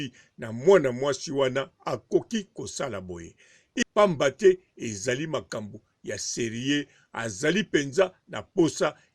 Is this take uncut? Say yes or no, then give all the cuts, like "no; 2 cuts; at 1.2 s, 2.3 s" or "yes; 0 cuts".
no; 1 cut; at 3.8 s